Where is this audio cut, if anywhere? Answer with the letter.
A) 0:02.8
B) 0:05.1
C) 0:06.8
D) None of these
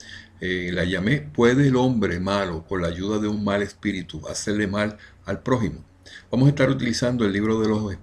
A